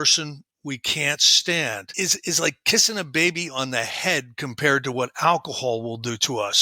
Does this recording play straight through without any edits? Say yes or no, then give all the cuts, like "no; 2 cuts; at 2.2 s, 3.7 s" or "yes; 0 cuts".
no; 1 cut; at 1.9 s